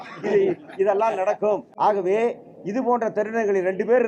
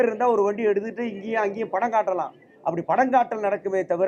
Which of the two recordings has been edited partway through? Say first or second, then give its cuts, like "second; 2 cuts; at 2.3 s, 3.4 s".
first; 1 cut; at 1.7 s